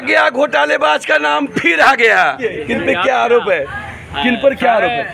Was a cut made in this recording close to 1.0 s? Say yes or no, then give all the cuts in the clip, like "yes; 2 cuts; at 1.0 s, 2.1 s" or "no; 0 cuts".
no; 1 cut; at 2.4 s